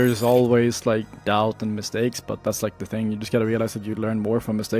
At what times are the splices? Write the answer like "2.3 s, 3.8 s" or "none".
1.1 s